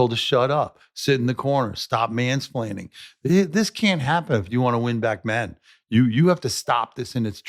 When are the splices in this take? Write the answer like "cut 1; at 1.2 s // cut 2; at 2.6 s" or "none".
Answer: none